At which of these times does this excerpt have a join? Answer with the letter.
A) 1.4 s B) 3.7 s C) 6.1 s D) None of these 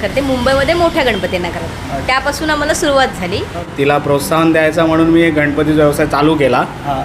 B